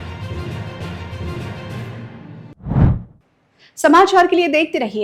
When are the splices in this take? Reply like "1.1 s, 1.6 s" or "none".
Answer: none